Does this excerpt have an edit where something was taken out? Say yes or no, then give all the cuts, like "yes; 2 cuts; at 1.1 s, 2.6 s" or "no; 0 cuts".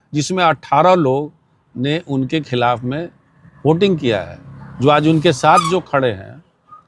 no; 0 cuts